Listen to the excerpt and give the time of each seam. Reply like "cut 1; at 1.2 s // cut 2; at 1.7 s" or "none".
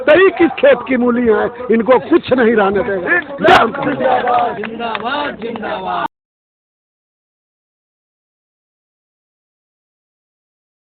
none